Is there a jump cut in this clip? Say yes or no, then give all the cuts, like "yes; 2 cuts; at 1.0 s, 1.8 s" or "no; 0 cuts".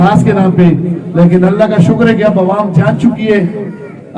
no; 0 cuts